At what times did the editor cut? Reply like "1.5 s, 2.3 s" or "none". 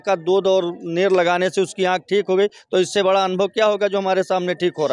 none